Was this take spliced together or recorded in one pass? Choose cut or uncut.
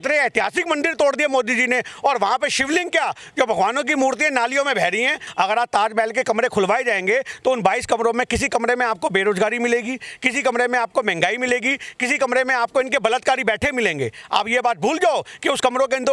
cut